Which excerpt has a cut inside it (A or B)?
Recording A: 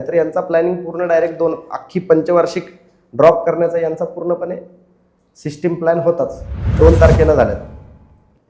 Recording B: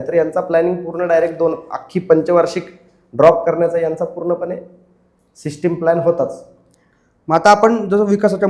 A